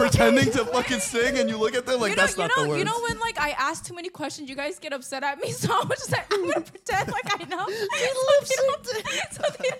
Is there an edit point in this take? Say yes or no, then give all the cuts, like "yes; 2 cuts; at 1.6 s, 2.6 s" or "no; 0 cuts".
no; 0 cuts